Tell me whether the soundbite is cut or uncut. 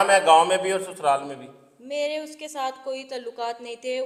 uncut